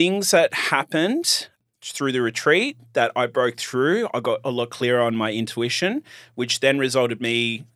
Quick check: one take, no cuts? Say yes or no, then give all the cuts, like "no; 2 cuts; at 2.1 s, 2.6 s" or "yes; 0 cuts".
no; 1 cut; at 1.6 s